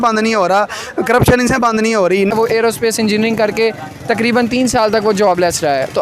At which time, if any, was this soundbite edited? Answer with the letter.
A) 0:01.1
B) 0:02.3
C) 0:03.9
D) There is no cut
B